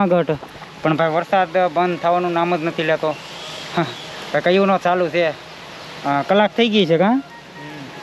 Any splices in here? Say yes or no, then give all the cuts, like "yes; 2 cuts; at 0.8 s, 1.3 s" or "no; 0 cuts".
no; 0 cuts